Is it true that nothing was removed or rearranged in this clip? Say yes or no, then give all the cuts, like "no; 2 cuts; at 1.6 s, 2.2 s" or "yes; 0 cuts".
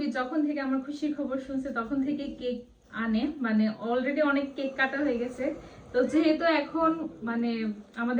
yes; 0 cuts